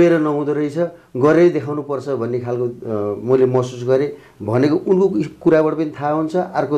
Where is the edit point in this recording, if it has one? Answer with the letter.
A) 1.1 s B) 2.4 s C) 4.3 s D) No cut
D